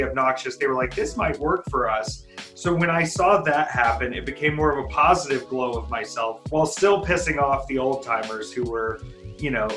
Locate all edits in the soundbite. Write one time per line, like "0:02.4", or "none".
0:06.4